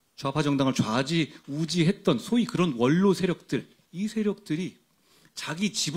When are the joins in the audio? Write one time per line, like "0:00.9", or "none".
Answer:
0:03.8